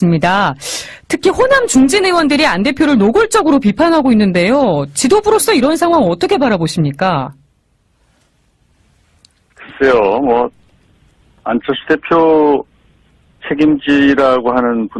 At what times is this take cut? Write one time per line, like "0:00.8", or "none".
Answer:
none